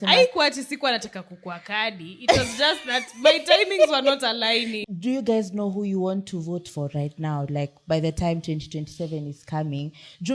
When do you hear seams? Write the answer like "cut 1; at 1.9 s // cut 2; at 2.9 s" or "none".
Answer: cut 1; at 4.8 s